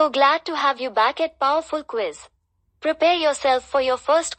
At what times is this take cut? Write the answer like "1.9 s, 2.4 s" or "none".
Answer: none

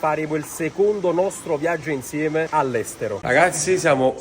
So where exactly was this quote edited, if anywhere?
3.2 s

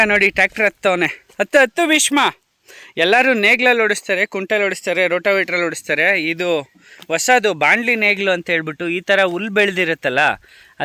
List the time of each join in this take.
none

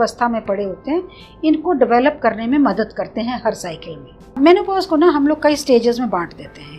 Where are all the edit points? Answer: 4.4 s

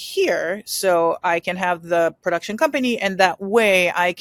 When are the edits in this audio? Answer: none

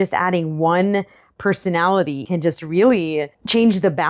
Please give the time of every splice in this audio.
2.2 s

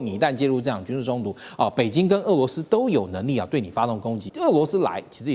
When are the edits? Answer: 4.2 s

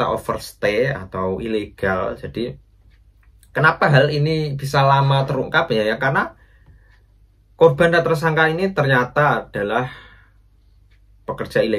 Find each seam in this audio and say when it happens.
none

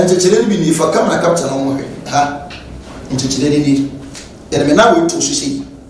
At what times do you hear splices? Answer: none

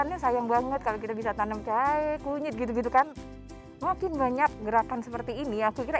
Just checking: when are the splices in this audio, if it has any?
3.4 s

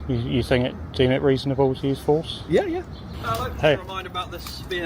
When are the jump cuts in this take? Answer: 3.2 s

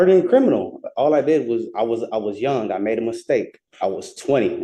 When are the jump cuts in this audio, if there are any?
3.6 s

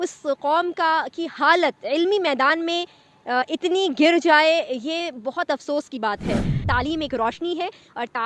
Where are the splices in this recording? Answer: 6.6 s

